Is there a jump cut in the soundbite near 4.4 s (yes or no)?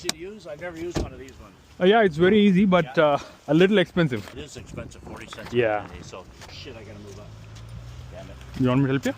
yes